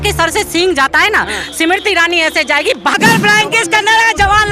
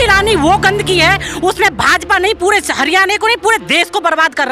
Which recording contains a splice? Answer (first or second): first